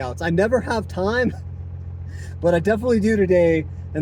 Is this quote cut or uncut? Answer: uncut